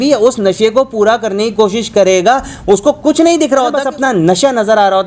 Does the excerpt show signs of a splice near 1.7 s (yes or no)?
no